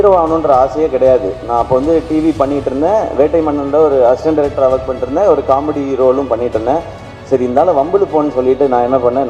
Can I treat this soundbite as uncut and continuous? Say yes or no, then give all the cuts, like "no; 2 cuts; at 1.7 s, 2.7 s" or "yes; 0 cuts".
yes; 0 cuts